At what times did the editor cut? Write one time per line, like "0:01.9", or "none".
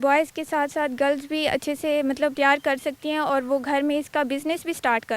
0:02.3